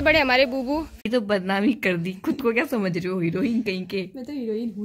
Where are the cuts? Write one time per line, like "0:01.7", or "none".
0:00.9